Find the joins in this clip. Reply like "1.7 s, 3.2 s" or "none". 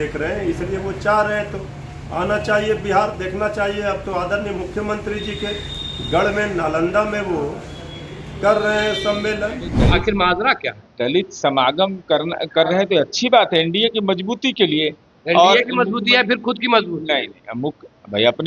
9.7 s